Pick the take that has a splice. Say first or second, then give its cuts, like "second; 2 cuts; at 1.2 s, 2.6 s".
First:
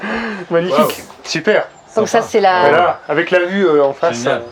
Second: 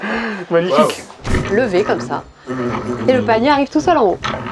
second; 1 cut; at 1.3 s